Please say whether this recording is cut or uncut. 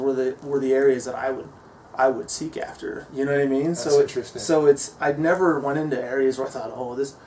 uncut